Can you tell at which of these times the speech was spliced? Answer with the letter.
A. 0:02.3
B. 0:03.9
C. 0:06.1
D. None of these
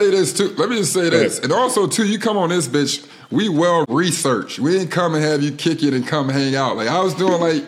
B